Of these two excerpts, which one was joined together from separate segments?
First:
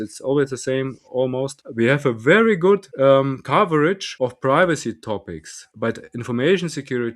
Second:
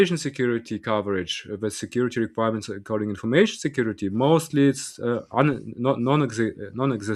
first; 4 cuts; at 1.6 s, 2.9 s, 4.1 s, 5.6 s

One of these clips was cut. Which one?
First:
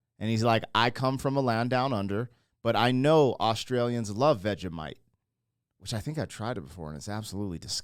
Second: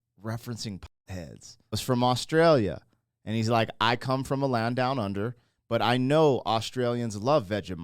second; 1 cut; at 1.8 s

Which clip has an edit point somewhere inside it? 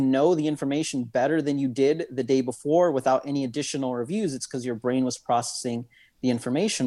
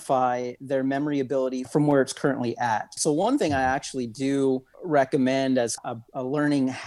second; 4 cuts; at 1.7 s, 2.9 s, 4.7 s, 5.8 s

